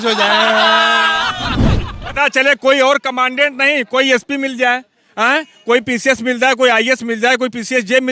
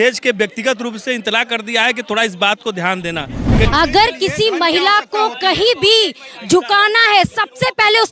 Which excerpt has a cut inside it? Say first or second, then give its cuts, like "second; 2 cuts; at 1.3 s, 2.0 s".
second; 1 cut; at 3.7 s